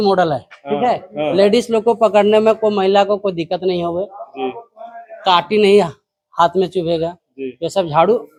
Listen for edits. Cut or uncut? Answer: uncut